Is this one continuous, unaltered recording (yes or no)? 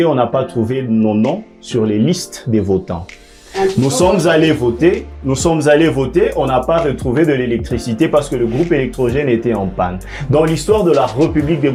yes